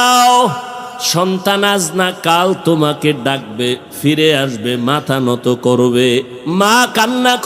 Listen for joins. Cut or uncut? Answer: cut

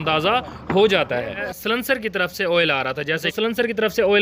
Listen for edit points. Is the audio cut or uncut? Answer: cut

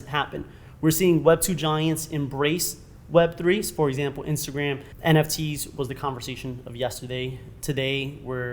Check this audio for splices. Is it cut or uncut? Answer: cut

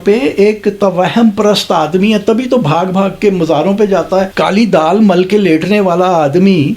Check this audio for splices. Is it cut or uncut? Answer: cut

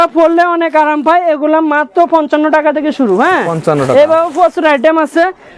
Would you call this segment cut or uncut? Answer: uncut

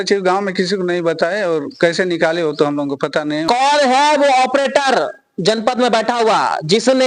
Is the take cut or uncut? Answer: cut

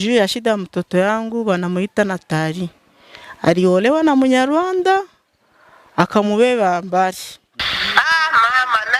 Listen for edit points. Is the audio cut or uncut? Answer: cut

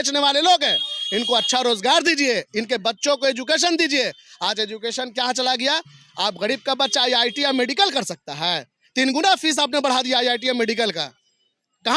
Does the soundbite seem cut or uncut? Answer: uncut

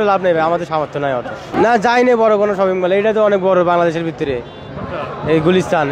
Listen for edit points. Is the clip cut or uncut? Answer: cut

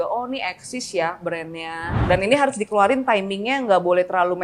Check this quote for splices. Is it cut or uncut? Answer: cut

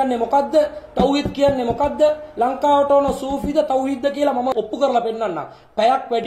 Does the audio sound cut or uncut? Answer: cut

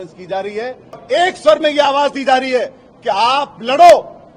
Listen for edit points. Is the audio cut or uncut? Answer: cut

